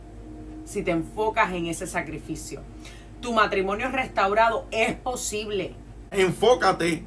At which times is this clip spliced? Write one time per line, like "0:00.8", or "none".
0:06.1